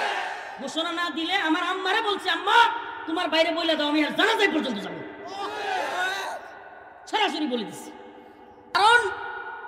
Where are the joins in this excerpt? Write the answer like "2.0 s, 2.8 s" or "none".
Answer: 8.8 s